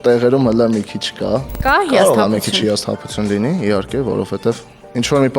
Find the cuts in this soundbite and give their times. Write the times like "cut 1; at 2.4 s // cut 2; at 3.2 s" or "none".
cut 1; at 1.6 s